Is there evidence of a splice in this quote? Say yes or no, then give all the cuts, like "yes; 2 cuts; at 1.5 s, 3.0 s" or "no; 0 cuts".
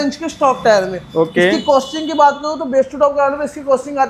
no; 0 cuts